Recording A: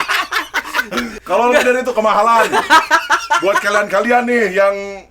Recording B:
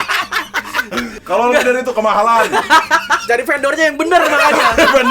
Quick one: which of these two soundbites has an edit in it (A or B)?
B